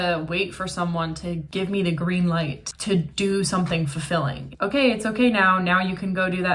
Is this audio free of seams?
no; 3 cuts; at 1.4 s, 2.6 s, 4.5 s

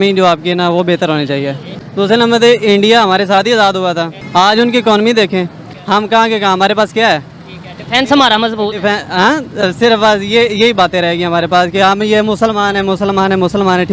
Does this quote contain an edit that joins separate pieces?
no; 0 cuts

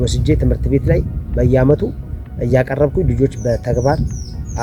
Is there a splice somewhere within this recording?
no; 0 cuts

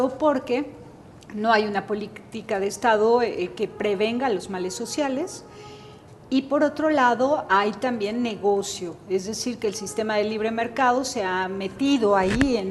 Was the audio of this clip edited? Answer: no; 0 cuts

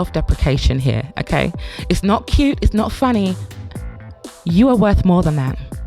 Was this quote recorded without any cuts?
yes; 0 cuts

